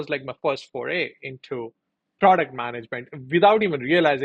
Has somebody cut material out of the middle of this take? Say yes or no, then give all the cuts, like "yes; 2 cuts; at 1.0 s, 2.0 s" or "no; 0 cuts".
no; 0 cuts